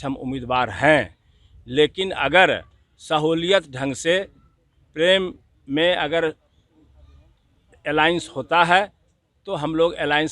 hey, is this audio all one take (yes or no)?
no